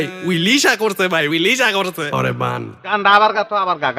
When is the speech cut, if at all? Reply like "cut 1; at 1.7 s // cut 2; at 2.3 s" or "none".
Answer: cut 1; at 2.9 s